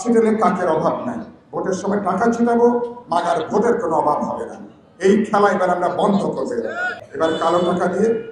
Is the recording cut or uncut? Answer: cut